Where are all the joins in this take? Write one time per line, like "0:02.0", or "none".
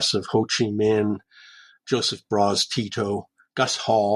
none